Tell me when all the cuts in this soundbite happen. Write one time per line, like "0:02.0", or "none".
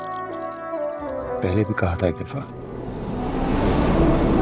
0:01.4